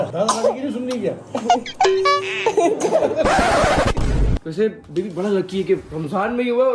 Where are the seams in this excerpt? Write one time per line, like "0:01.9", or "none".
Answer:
0:04.4